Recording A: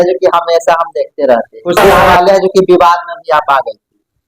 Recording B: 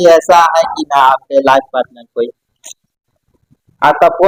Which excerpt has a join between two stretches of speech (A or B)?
A